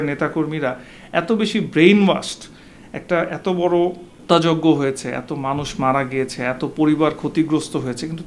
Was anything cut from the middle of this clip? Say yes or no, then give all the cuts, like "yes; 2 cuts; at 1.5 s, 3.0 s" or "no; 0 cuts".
yes; 1 cut; at 4.1 s